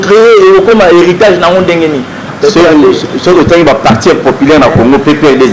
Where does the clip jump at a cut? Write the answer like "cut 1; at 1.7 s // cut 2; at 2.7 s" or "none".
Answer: cut 1; at 2.2 s